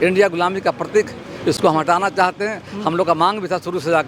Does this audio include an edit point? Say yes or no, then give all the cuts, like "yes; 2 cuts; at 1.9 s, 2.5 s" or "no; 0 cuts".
no; 0 cuts